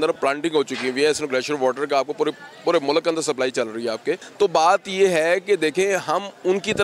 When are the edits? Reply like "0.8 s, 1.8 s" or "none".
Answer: 4.3 s